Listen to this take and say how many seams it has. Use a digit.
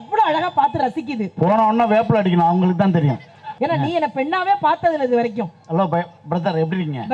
1